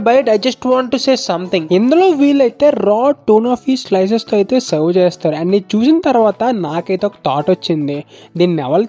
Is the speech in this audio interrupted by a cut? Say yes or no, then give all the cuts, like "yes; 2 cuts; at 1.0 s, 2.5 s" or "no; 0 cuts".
yes; 1 cut; at 1.6 s